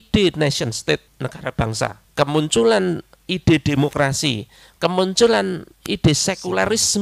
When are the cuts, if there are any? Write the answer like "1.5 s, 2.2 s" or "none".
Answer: 1.6 s